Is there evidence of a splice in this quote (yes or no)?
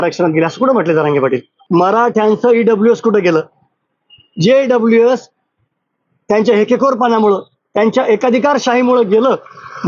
yes